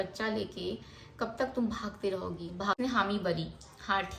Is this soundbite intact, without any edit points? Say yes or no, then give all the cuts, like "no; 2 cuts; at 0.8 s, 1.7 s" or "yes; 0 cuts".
no; 1 cut; at 2.8 s